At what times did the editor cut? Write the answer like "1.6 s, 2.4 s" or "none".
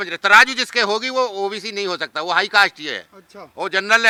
none